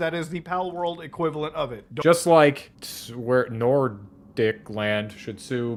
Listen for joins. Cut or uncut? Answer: uncut